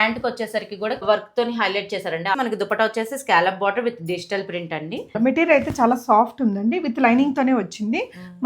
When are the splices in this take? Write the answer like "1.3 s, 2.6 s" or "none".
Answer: 1.0 s, 2.4 s, 5.2 s